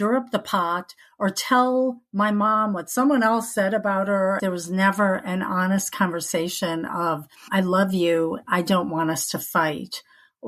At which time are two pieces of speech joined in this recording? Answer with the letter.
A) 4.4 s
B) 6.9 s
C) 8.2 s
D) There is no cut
A